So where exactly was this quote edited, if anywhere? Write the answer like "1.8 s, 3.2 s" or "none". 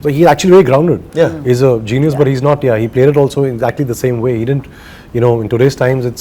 none